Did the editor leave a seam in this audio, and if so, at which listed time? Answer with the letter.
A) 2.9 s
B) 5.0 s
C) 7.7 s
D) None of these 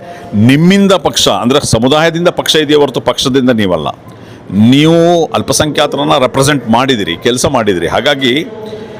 D